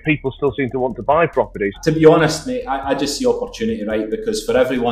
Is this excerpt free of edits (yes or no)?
no